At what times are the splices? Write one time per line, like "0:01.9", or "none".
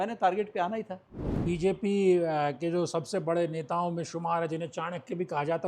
0:01.4